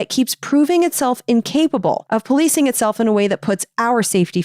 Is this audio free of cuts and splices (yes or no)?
no